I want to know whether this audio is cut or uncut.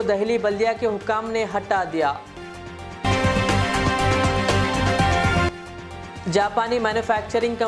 uncut